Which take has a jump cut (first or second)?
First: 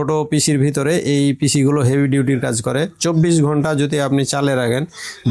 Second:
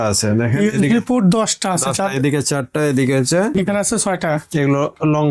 second